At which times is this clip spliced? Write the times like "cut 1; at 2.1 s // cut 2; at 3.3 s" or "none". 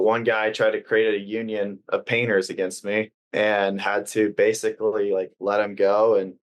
cut 1; at 3.2 s